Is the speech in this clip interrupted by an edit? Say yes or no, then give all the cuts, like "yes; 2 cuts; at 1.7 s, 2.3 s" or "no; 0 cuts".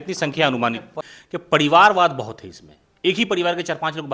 yes; 1 cut; at 1.0 s